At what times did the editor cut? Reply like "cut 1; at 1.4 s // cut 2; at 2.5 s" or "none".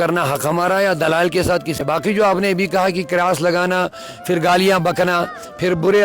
cut 1; at 1.8 s